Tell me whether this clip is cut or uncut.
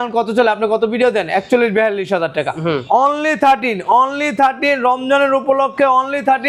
uncut